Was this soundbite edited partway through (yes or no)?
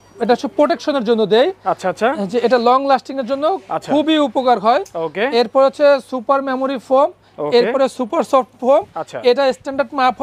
no